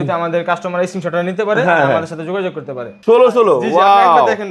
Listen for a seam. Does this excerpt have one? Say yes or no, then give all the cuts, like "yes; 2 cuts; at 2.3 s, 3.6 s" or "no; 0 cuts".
yes; 1 cut; at 2.8 s